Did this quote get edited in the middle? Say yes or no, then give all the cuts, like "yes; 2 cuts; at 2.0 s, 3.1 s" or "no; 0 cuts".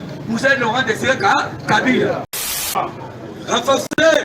yes; 1 cut; at 2.7 s